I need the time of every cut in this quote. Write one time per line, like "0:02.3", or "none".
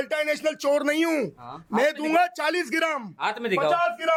none

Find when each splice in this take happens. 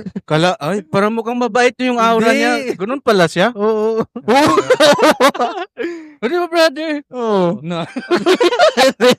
none

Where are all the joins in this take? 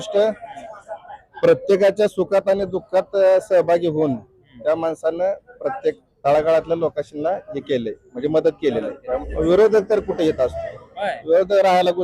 0:09.2

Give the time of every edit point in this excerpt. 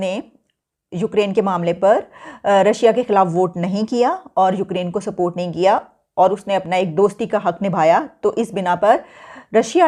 none

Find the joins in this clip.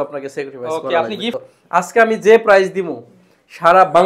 0:01.3

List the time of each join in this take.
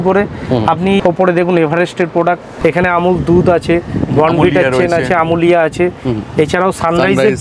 0:01.0
0:02.5

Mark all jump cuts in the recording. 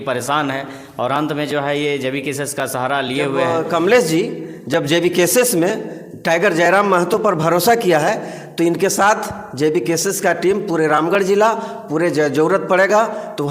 0:03.4

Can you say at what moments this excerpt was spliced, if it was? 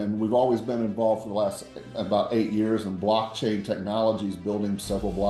none

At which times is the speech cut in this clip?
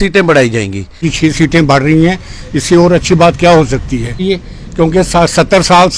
0:01.1
0:04.2

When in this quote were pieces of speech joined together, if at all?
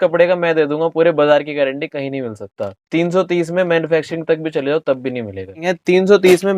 0:05.7

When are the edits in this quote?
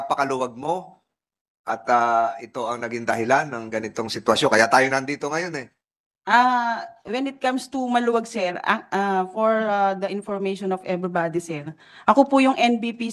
none

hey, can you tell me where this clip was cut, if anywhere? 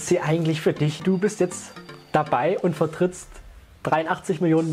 0:01.0

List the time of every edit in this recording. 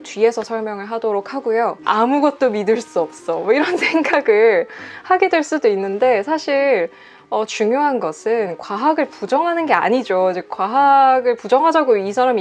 0:01.8

